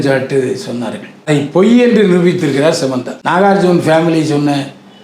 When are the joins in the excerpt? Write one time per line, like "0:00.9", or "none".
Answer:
0:01.3
0:03.1

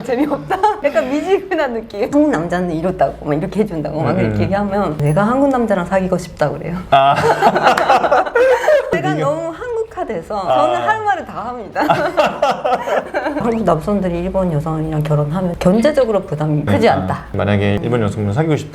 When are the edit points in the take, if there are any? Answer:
0:02.1
0:08.9
0:13.4
0:17.2

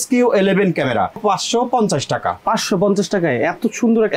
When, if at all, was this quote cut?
0:01.2

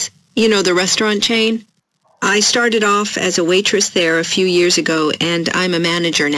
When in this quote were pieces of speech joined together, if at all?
0:04.1
0:05.2

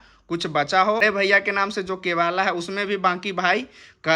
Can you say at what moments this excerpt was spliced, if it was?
0:01.0

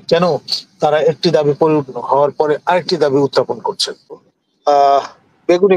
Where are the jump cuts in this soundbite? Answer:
0:04.3

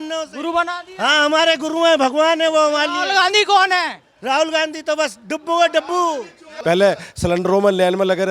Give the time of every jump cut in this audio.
0:06.5

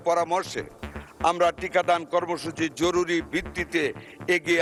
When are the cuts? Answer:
none

